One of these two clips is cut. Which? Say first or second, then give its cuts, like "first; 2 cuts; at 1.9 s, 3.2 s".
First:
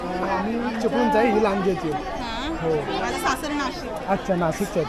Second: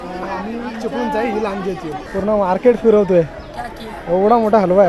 second; 1 cut; at 2.0 s